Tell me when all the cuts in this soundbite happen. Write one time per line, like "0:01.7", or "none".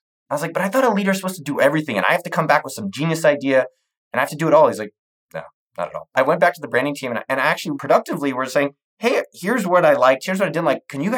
none

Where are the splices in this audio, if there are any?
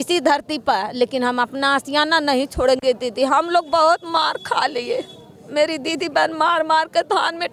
none

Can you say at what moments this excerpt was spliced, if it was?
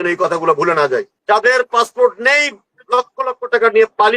0:01.1

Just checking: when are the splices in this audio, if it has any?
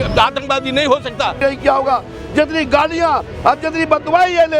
0:01.4

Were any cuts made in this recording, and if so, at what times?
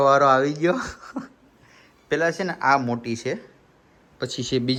none

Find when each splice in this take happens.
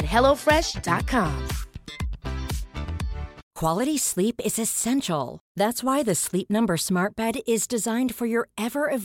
0:03.5

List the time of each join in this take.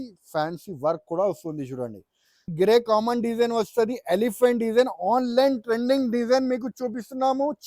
0:02.5

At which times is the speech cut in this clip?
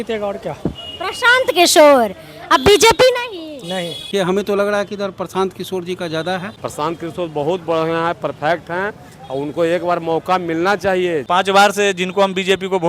0:04.0
0:06.6
0:11.2

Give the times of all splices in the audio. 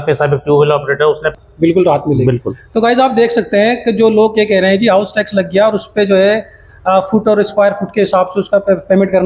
0:01.3

